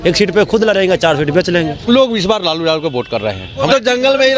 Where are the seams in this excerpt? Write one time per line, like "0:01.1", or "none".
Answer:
0:01.9
0:03.7